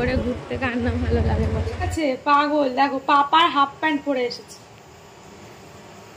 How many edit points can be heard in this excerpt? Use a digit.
1